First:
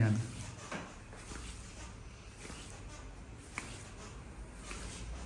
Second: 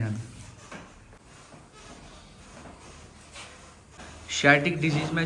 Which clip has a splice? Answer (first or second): second